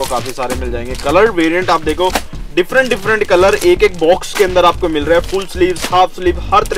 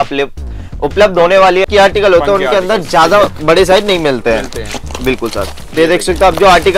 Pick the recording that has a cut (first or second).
second